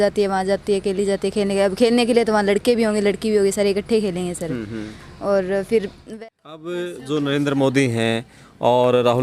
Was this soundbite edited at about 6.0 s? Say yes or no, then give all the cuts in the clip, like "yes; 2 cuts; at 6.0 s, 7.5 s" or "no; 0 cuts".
yes; 1 cut; at 6.0 s